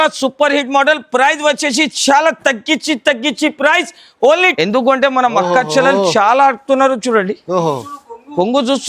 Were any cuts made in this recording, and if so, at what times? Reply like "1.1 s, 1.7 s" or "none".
4.5 s